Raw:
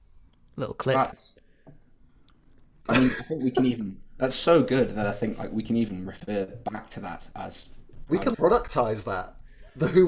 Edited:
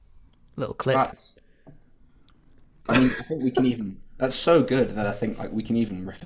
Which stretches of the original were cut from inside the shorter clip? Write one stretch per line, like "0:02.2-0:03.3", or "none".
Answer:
none